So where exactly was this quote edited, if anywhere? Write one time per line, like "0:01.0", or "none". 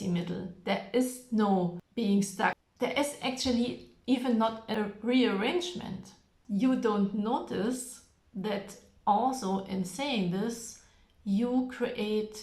0:01.8
0:02.6
0:04.7
0:06.3